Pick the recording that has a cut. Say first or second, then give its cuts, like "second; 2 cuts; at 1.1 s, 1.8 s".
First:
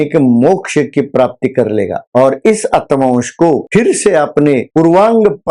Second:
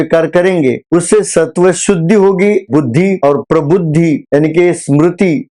second; 1 cut; at 2.7 s